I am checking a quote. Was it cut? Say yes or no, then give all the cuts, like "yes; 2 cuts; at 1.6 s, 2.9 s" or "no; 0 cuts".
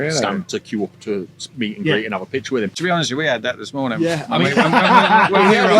yes; 1 cut; at 2.8 s